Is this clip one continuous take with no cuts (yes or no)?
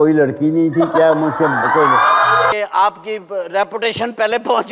no